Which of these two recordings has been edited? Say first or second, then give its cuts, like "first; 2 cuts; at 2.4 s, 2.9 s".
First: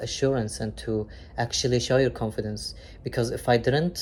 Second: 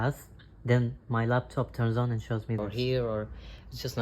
second; 1 cut; at 2.6 s